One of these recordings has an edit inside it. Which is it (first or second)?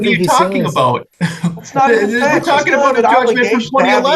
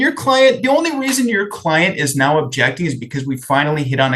first